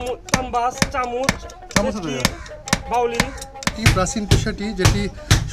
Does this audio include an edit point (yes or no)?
yes